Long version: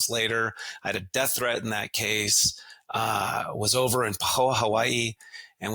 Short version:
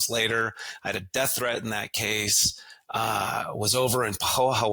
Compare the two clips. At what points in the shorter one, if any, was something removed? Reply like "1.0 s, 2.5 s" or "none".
none

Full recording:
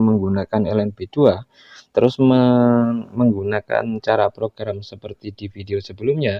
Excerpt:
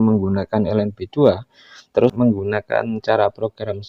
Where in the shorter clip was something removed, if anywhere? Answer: 2.1 s

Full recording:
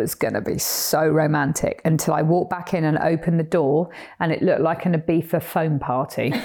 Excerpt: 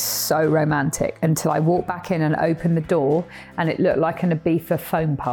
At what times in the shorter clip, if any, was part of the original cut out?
none

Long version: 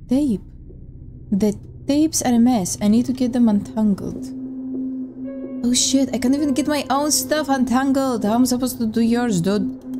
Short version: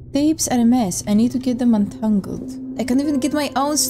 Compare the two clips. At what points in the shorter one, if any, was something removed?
2.8 s

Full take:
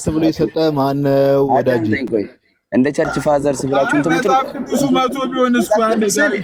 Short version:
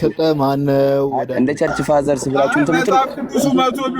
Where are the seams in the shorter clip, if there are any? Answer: 1.3 s

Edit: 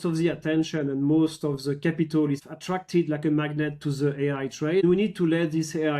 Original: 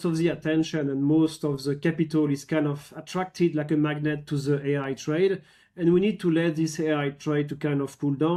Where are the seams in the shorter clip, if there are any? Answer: 2.4 s, 4.8 s

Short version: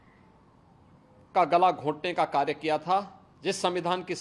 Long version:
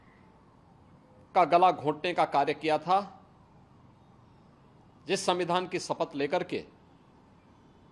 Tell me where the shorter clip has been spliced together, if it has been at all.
3.2 s

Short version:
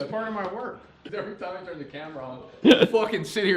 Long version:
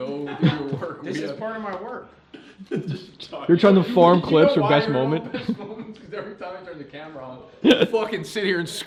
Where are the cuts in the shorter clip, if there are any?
1.0 s

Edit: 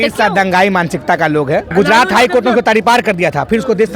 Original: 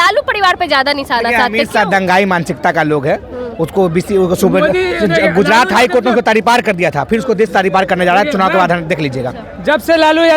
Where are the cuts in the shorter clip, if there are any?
1.7 s

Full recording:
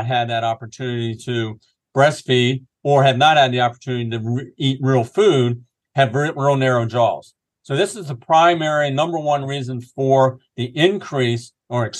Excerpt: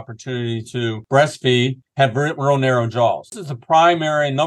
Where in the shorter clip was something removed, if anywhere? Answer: 1.0 s, 1.8 s, 3.5 s

